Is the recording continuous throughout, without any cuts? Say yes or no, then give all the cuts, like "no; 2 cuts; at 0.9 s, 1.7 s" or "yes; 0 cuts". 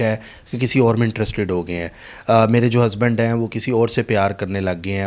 yes; 0 cuts